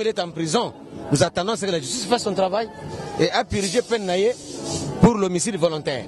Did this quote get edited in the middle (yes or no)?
no